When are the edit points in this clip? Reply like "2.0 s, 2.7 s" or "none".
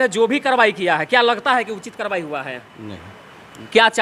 none